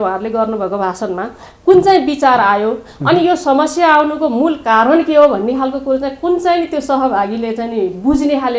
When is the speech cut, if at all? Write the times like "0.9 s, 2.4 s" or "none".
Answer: none

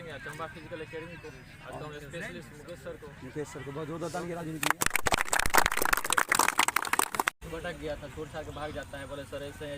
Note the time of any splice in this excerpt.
7.3 s

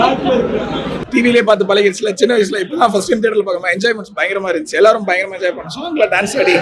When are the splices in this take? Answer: 0.9 s

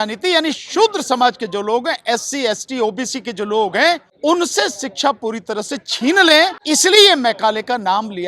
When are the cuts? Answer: 4.1 s, 6.6 s

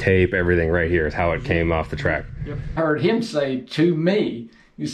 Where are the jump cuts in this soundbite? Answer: 2.8 s

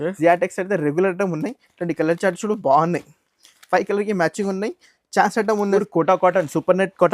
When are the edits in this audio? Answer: 5.8 s

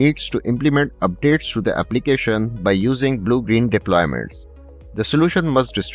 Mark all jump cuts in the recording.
none

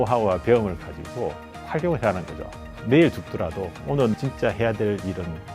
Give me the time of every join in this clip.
2.6 s, 4.1 s

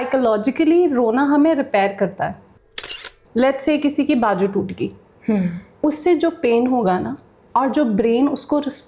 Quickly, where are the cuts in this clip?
2.8 s

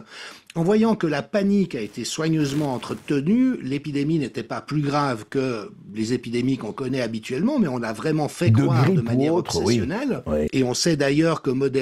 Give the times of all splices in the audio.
10.5 s

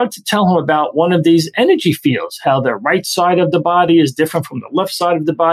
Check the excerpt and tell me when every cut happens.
none

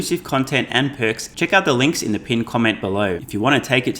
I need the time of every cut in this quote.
1.3 s, 3.2 s

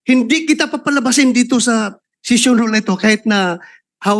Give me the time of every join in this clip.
none

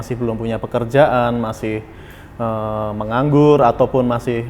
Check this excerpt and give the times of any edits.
none

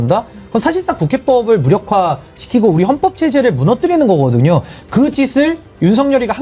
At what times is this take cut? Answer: none

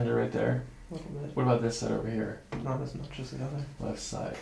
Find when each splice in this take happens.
none

